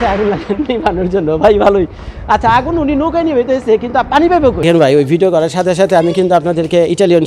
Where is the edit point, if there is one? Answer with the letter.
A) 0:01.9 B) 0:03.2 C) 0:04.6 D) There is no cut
C